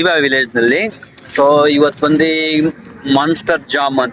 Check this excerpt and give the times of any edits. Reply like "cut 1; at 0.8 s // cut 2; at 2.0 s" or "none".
none